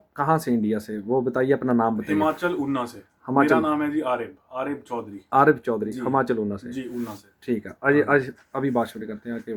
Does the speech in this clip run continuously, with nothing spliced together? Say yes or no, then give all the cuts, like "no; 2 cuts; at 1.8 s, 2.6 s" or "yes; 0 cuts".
yes; 0 cuts